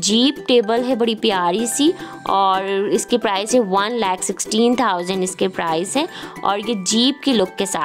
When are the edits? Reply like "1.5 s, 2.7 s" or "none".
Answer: none